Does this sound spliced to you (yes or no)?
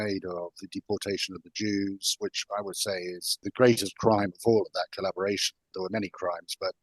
yes